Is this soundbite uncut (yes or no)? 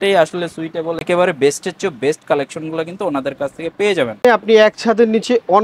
no